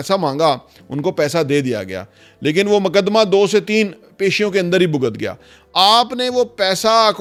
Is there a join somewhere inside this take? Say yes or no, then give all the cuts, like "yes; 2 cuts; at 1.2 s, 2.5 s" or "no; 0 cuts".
no; 0 cuts